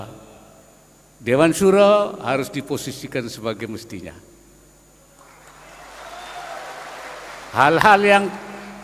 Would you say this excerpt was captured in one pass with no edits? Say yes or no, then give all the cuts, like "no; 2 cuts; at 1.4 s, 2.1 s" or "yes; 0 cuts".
yes; 0 cuts